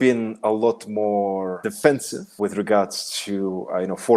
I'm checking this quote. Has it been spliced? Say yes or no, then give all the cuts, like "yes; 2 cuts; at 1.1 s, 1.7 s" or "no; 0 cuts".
yes; 2 cuts; at 1.6 s, 2.3 s